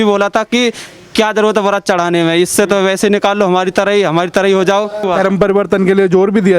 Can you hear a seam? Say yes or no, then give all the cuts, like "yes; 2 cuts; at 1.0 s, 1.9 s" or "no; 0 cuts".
yes; 1 cut; at 5.0 s